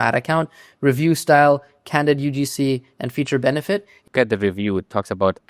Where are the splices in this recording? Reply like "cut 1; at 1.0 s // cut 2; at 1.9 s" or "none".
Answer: cut 1; at 4.1 s